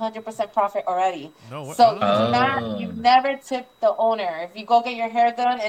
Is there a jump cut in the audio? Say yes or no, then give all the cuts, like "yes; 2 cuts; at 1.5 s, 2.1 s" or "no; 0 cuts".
no; 0 cuts